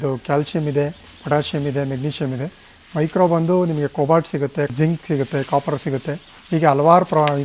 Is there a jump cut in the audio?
no; 0 cuts

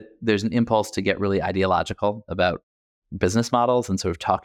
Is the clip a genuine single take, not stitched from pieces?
yes; 0 cuts

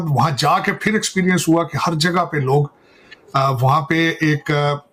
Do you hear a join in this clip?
no; 0 cuts

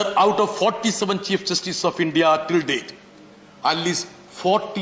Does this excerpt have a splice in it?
no; 0 cuts

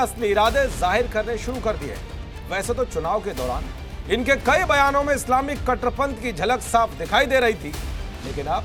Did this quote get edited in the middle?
no; 0 cuts

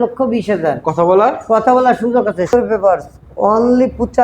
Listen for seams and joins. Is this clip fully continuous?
no; 1 cut; at 2.5 s

